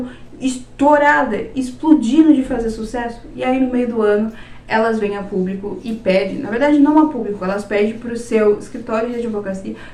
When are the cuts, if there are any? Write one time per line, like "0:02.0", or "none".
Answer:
none